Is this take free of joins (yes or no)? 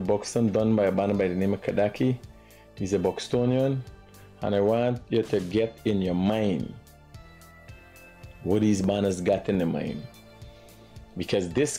no